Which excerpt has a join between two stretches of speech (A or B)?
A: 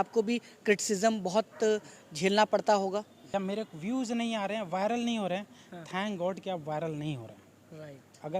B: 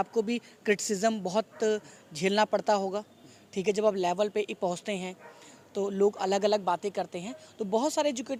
A